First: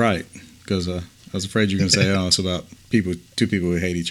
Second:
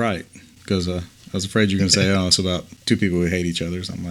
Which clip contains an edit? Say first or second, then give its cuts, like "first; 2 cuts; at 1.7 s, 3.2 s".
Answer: second; 1 cut; at 2.8 s